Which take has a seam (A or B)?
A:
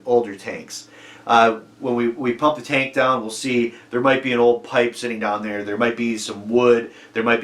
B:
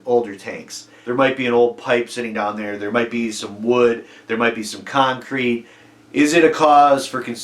B